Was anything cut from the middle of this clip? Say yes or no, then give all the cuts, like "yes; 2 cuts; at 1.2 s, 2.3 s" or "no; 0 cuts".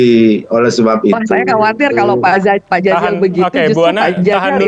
no; 0 cuts